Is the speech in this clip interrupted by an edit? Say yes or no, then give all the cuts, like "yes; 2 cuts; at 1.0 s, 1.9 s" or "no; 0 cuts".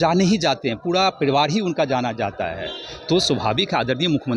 no; 0 cuts